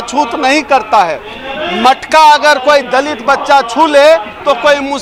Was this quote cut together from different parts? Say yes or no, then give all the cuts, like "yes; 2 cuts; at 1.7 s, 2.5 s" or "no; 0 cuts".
no; 0 cuts